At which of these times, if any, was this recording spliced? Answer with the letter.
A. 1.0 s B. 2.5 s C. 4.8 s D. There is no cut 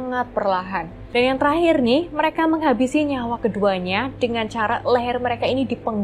A